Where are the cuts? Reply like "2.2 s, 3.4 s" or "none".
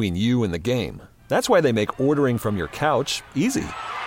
none